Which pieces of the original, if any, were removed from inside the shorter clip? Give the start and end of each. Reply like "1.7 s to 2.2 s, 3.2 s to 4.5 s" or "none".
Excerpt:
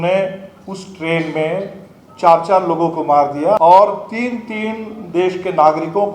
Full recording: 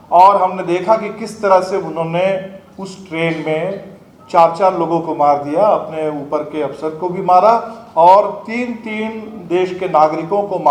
5.7 s to 7.9 s